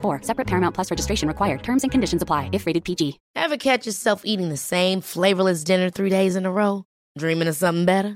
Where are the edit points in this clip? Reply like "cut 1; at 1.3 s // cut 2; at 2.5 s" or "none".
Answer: cut 1; at 3.2 s